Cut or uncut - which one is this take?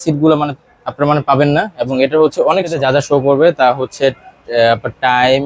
cut